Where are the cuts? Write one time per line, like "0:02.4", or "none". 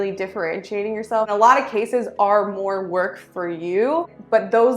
0:01.3